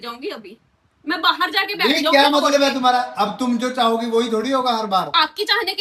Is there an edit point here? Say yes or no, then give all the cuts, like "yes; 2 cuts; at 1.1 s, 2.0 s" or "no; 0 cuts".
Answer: no; 0 cuts